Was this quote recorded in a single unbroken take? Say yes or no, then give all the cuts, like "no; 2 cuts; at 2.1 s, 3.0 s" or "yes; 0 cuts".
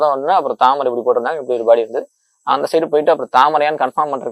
yes; 0 cuts